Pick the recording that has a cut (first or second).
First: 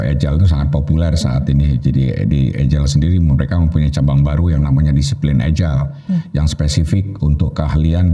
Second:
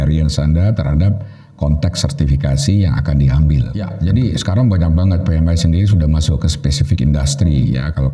second